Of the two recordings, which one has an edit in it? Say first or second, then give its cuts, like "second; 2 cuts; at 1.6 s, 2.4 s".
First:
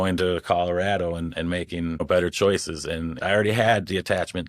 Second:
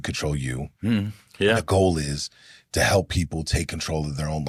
first; 2 cuts; at 2.0 s, 3.2 s